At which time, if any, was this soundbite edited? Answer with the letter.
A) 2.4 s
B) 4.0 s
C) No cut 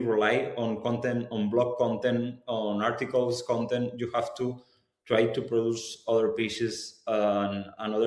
C